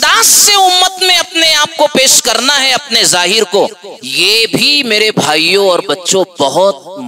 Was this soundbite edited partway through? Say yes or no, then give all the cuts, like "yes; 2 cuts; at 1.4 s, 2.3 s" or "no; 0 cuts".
no; 0 cuts